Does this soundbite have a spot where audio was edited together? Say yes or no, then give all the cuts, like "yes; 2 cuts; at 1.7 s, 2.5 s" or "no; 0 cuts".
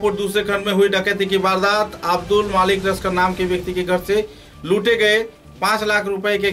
no; 0 cuts